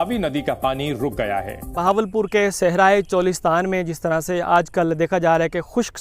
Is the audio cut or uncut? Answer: cut